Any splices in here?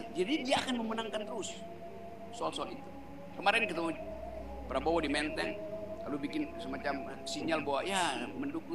no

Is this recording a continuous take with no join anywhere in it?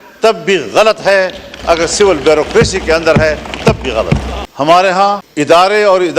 no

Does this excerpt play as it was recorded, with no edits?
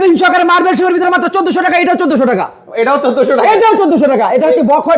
yes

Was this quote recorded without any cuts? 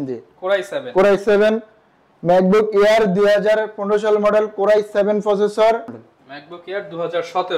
no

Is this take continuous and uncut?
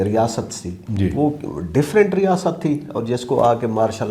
yes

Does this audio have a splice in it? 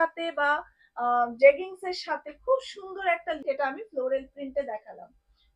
yes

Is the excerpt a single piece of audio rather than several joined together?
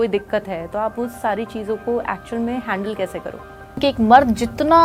no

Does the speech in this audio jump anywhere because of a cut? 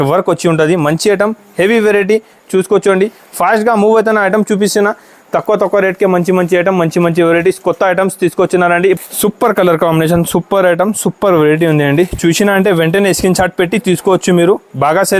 yes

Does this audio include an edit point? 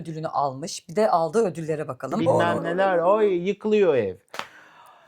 yes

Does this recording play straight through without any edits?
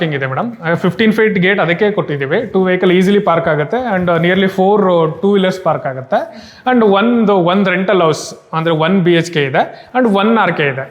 yes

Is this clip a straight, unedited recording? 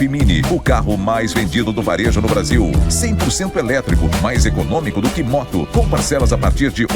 yes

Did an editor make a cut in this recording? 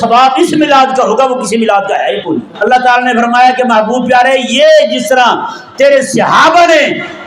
yes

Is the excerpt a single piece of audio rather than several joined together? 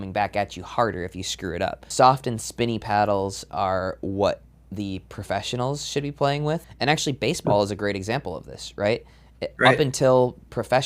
no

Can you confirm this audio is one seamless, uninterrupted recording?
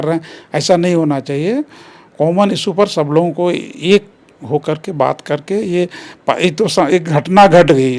yes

